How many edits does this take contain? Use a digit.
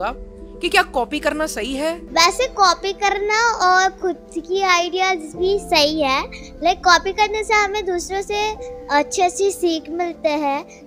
1